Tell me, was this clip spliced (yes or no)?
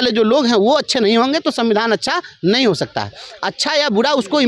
no